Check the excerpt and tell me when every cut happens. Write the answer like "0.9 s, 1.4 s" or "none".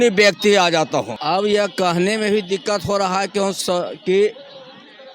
1.1 s